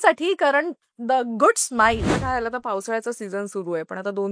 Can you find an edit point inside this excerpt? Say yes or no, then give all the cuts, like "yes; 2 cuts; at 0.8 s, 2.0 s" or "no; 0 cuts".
yes; 1 cut; at 2.1 s